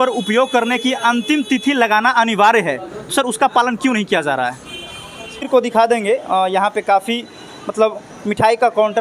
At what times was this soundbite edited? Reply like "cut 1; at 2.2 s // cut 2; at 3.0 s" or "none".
cut 1; at 5.5 s